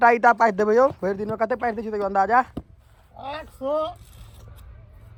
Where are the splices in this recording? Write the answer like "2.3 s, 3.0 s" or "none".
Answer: none